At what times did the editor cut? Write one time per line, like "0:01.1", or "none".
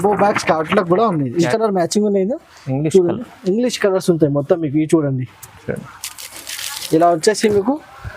0:01.5